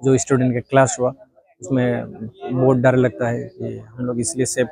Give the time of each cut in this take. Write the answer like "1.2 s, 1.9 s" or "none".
none